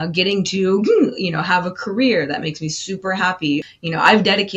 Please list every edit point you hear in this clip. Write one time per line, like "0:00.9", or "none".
0:03.6